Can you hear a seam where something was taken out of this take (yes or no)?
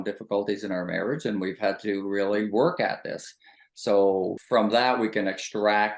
yes